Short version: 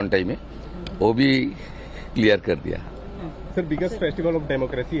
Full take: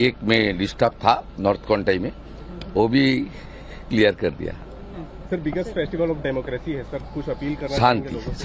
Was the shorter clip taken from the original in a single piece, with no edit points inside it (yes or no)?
yes